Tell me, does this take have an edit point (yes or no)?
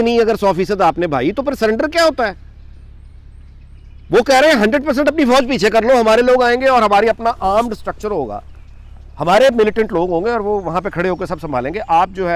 no